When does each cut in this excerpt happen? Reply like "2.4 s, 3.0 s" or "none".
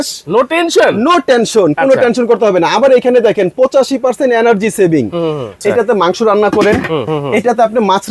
5.5 s, 7.1 s